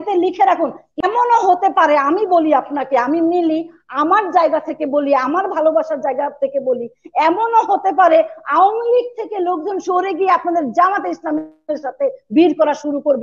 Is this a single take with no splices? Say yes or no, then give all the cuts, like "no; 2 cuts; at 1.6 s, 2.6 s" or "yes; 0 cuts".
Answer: no; 1 cut; at 1.0 s